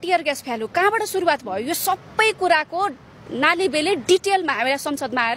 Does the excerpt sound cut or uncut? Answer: uncut